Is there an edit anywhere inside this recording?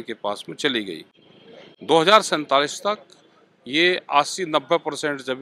no; 0 cuts

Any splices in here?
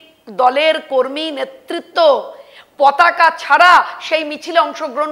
no; 0 cuts

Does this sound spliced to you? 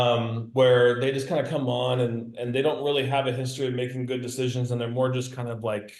no; 0 cuts

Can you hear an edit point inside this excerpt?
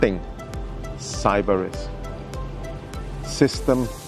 no; 0 cuts

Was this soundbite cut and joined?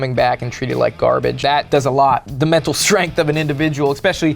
yes; 2 cuts; at 1.4 s, 2.2 s

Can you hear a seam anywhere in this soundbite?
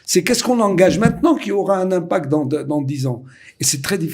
no; 0 cuts

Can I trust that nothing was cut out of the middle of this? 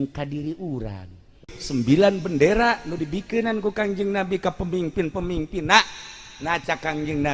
no; 1 cut; at 1.6 s

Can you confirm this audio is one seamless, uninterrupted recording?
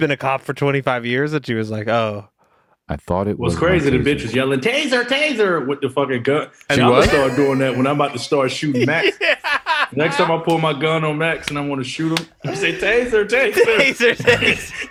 yes; 0 cuts

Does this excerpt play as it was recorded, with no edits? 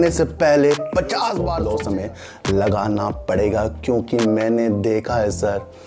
no; 1 cut; at 1.5 s

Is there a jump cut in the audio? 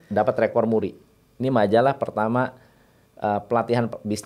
no; 0 cuts

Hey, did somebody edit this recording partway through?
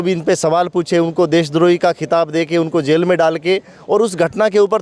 no; 0 cuts

